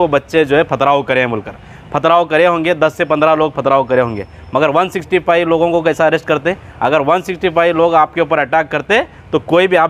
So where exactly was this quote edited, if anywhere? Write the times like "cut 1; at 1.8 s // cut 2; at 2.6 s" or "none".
none

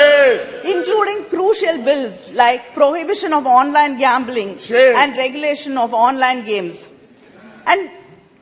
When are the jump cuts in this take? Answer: none

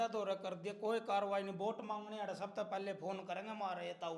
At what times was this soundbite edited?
none

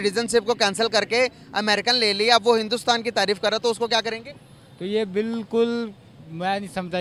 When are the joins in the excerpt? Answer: none

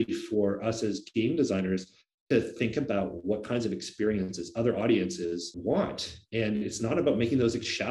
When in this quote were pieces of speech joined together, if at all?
none

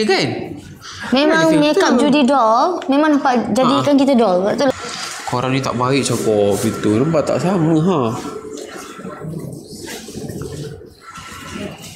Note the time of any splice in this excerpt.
cut 1; at 4.7 s

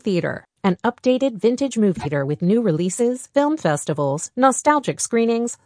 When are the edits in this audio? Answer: cut 1; at 2.0 s

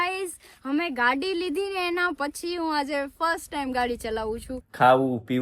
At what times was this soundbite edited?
cut 1; at 4.5 s

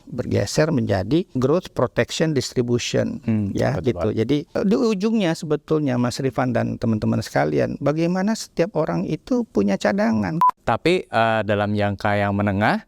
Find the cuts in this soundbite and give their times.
cut 1; at 1.3 s // cut 2; at 4.5 s // cut 3; at 10.4 s

